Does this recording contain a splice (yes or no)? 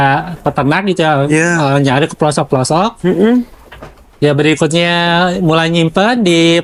no